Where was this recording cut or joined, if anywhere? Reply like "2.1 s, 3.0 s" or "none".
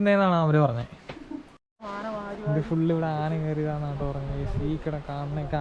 1.5 s